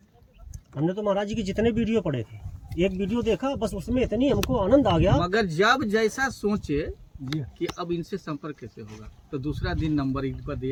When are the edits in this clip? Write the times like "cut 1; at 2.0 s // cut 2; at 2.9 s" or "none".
none